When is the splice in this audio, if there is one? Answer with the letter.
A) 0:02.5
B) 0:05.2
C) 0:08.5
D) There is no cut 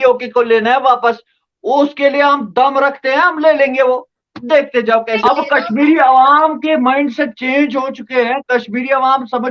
B